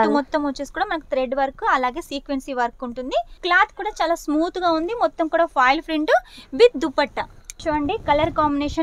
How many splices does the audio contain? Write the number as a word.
two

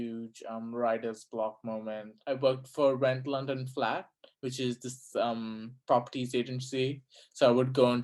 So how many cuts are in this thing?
one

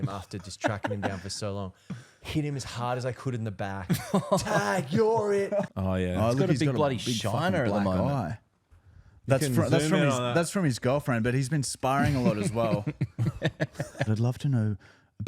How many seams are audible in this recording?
two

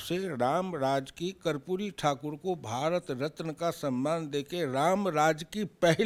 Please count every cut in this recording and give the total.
zero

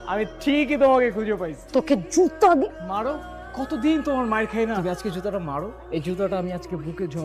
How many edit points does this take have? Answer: one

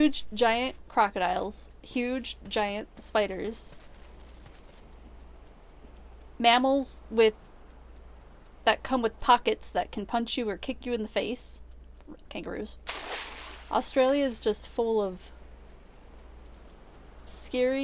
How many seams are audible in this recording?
zero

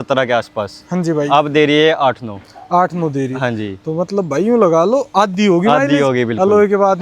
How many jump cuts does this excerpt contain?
zero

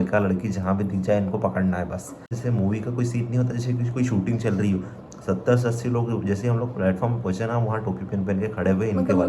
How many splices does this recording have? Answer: one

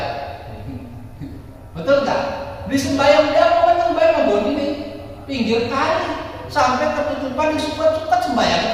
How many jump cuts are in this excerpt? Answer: zero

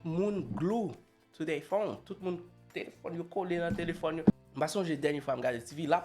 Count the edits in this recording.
one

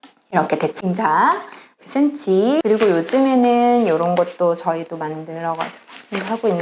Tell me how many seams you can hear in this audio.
two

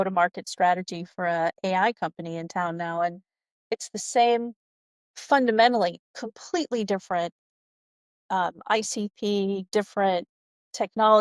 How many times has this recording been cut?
zero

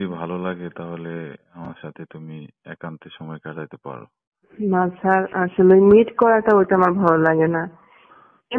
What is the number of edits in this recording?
one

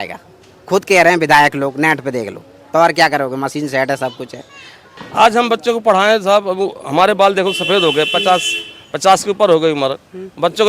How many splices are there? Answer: one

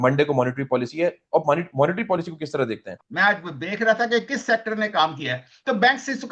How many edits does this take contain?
one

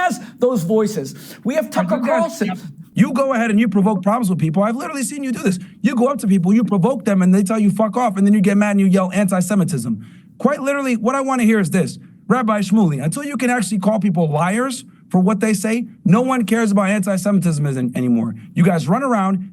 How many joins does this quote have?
one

